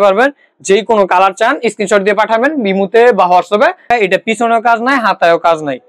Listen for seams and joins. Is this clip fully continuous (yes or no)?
no